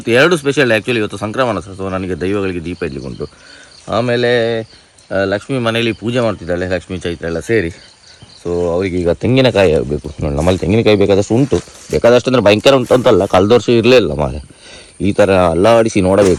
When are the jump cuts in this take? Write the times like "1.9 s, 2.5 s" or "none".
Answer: none